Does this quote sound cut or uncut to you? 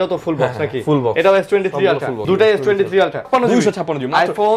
cut